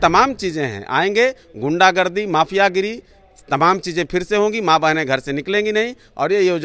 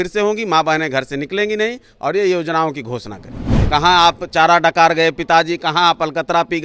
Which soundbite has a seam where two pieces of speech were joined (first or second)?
second